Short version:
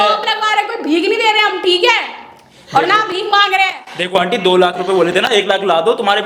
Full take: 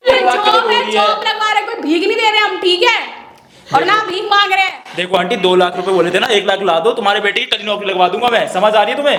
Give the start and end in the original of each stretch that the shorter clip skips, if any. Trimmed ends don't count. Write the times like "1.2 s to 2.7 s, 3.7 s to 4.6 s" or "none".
none